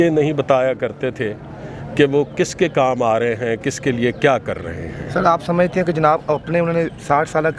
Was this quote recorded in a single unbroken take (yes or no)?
yes